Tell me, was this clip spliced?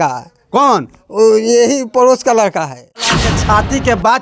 yes; 1 cut; at 3.2 s

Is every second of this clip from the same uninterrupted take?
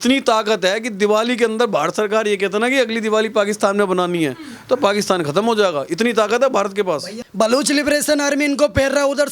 no; 1 cut; at 7.2 s

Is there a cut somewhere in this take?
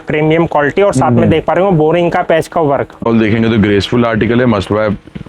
yes; 1 cut; at 3.0 s

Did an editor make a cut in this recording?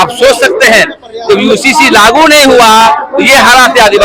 no; 0 cuts

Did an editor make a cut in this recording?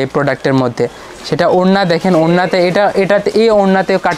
no; 0 cuts

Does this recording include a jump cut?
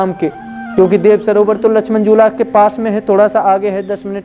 no; 0 cuts

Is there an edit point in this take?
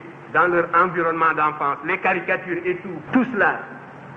yes; 1 cut; at 2.9 s

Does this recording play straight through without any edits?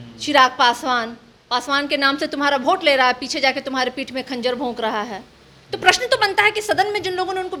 yes; 0 cuts

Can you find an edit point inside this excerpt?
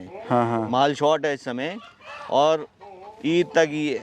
no; 0 cuts

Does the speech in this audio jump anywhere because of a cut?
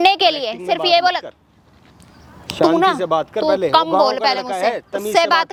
no; 0 cuts

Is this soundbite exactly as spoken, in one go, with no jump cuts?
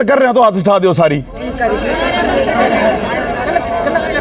yes; 0 cuts

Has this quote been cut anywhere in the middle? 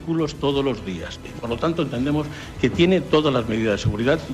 yes; 1 cut; at 1.1 s

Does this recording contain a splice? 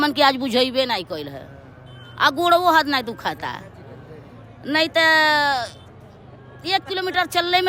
no; 0 cuts

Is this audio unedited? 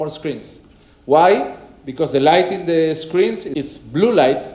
no; 1 cut; at 3.5 s

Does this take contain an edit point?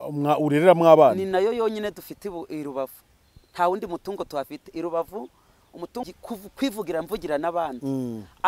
yes; 1 cut; at 6.0 s

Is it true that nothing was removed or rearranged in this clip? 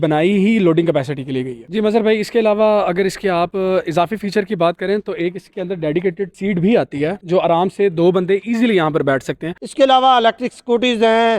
no; 2 cuts; at 1.6 s, 9.6 s

